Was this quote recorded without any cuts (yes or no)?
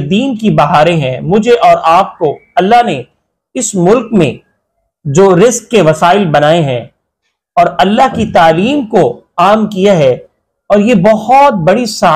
yes